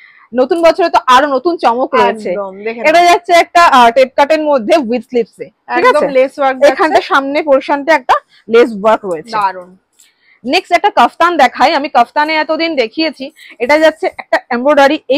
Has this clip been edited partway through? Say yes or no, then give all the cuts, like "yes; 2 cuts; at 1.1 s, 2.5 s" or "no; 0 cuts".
no; 0 cuts